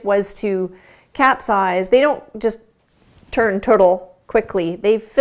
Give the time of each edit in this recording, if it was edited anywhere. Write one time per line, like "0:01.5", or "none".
none